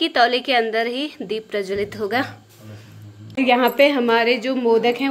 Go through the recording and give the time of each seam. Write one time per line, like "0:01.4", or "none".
0:03.2

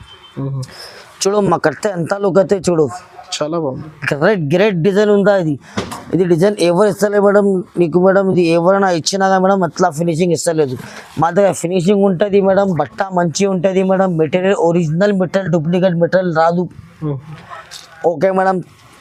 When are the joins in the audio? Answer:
none

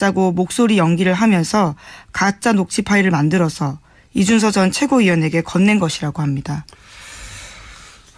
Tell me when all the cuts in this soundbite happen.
none

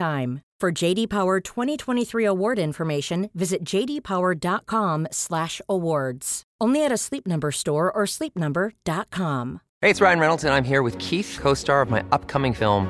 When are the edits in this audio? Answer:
0:09.6

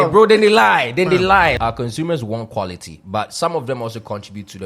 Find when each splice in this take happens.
0:01.5

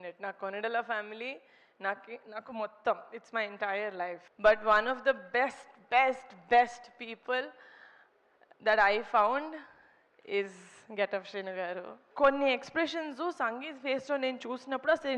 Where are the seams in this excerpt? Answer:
0:04.2
0:12.0

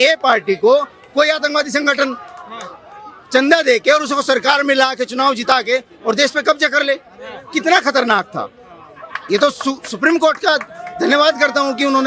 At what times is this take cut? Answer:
none

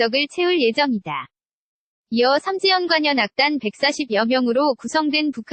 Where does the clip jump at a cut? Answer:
none

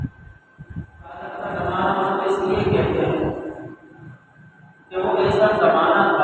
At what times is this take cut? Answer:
0:01.3

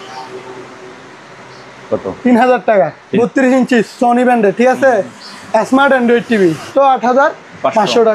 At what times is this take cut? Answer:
0:03.0
0:06.7

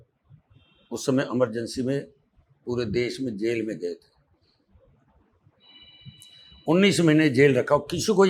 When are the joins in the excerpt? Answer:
none

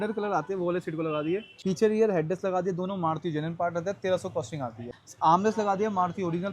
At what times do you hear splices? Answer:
0:01.5
0:04.9

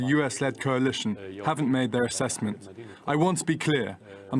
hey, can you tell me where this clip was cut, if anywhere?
0:01.1

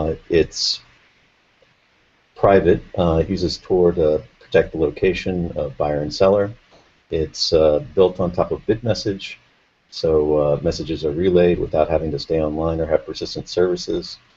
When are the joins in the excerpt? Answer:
0:13.0

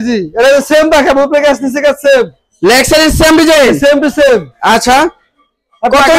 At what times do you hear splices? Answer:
none

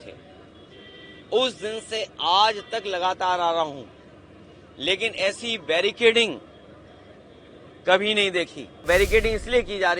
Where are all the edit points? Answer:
0:08.8

